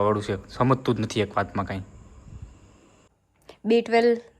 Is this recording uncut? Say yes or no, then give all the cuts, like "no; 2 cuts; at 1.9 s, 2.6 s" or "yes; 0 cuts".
no; 1 cut; at 3.0 s